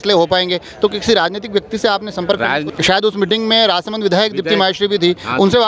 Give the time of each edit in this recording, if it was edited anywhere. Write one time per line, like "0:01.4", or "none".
0:02.7